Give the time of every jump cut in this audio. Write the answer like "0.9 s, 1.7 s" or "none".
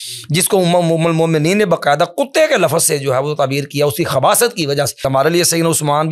5.0 s